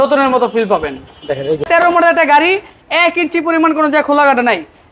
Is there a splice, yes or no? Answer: yes